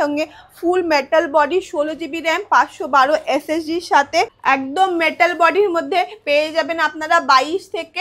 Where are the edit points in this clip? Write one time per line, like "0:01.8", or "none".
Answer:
0:04.3